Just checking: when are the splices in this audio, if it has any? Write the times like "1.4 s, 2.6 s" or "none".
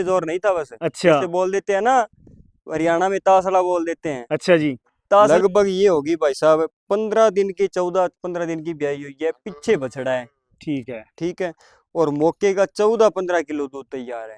5.3 s